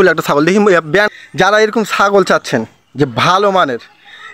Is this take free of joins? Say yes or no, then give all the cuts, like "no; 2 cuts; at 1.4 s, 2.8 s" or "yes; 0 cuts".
no; 1 cut; at 1.1 s